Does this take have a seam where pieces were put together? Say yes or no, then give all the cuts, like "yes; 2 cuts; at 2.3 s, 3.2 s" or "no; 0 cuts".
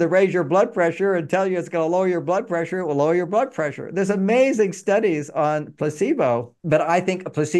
yes; 1 cut; at 6.5 s